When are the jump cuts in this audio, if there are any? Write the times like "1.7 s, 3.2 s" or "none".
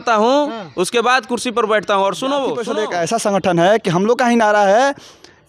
2.7 s